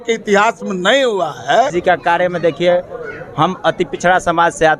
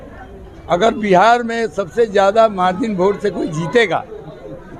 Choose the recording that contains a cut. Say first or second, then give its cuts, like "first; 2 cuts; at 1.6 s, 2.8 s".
first; 1 cut; at 1.7 s